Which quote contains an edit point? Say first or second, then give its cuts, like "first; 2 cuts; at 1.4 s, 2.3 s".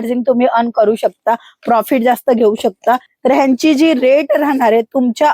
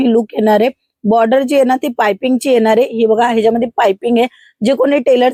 first; 1 cut; at 3.1 s